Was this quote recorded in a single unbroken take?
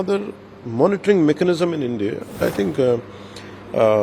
no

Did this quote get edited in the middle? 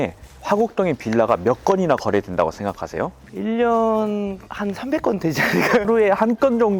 yes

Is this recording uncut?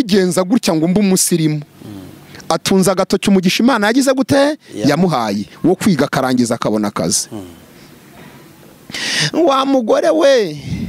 yes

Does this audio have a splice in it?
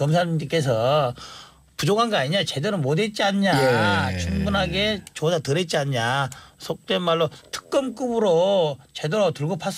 no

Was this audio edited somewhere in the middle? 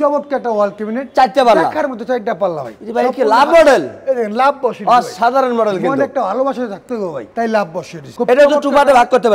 no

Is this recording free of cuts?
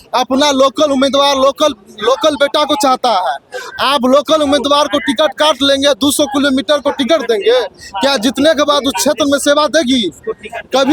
yes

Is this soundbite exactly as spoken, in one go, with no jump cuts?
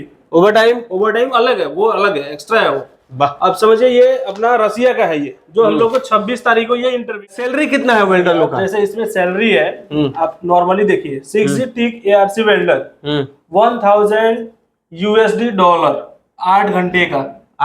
no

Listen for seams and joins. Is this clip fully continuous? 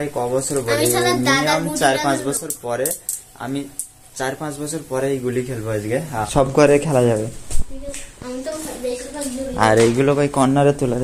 yes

